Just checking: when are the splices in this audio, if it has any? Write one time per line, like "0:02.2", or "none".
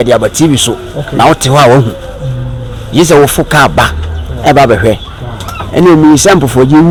none